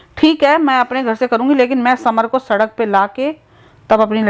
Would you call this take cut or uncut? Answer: uncut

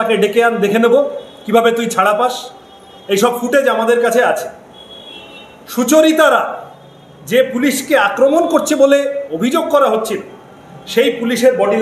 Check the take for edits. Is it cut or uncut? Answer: uncut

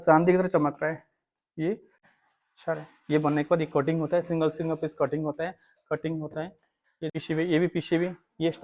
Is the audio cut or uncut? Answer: cut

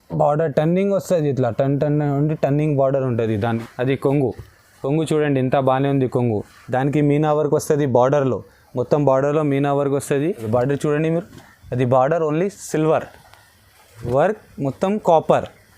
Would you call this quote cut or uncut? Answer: cut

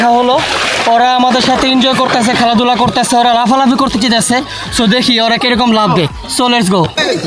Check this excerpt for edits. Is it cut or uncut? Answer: uncut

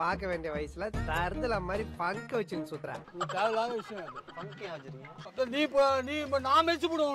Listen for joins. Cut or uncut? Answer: cut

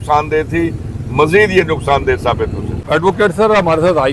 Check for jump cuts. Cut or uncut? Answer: uncut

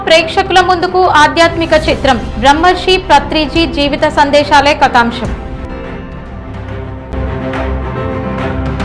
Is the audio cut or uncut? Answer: cut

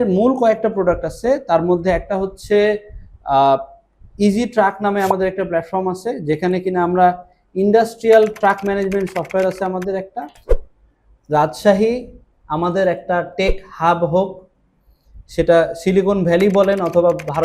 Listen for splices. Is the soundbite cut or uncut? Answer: cut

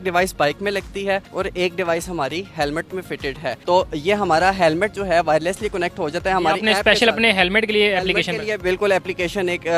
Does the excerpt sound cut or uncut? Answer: uncut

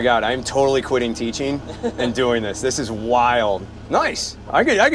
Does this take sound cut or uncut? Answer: uncut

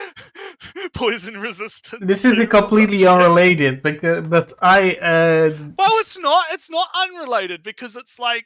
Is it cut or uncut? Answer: uncut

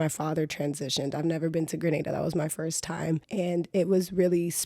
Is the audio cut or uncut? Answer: cut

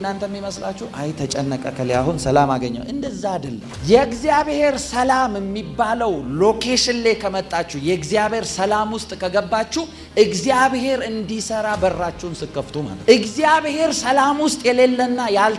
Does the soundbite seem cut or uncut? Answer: uncut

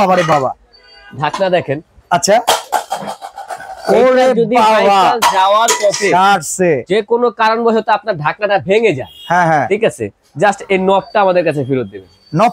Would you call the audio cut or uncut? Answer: uncut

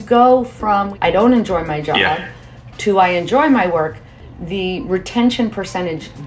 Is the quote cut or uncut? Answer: cut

